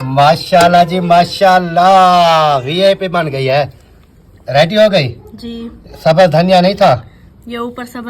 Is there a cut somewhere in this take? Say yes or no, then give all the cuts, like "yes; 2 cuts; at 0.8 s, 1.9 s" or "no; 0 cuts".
no; 0 cuts